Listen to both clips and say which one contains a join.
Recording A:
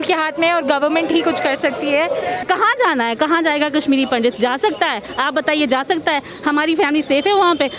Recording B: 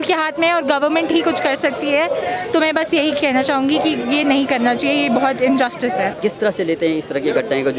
A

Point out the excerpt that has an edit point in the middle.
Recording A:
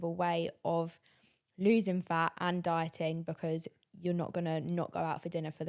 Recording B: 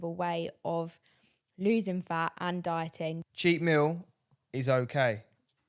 B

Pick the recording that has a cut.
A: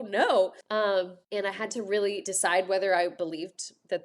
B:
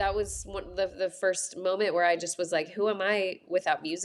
A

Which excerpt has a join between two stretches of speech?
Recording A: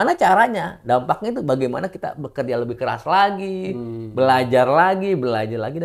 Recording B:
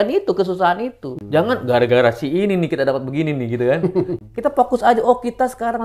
B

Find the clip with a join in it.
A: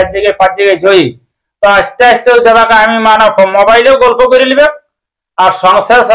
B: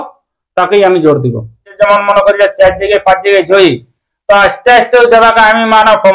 B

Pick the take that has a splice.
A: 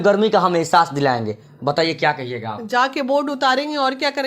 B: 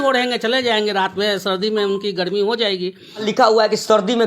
B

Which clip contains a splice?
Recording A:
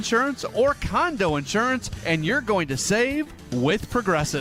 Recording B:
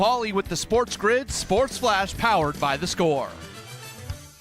B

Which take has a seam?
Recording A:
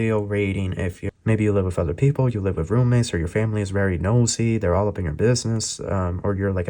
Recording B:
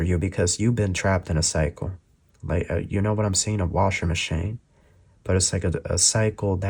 A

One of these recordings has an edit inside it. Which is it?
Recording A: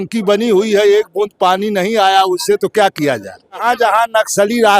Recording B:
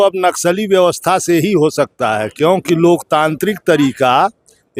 A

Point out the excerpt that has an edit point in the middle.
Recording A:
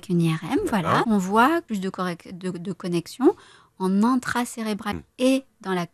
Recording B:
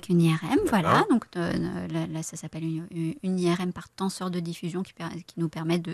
A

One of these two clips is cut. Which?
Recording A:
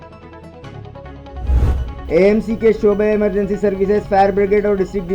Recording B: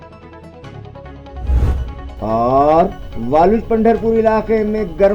B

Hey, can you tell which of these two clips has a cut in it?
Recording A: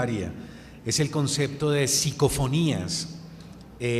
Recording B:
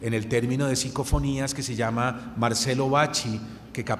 A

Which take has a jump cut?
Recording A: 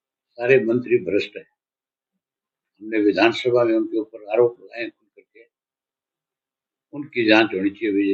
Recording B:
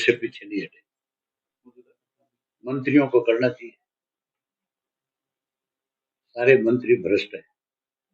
B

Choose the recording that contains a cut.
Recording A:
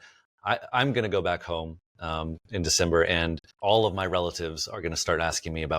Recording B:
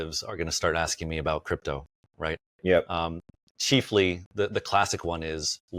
A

